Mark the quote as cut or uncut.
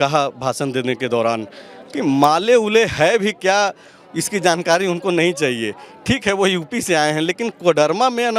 uncut